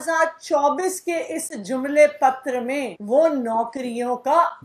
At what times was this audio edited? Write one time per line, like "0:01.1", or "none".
0:03.0